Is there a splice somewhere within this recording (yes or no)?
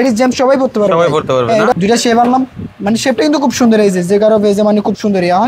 yes